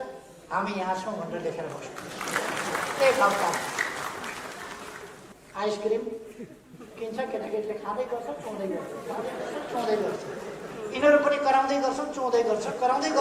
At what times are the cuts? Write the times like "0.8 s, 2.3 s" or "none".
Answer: 5.3 s